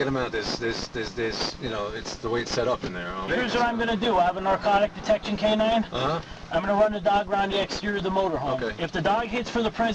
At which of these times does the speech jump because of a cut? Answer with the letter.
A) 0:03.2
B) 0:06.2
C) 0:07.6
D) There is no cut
A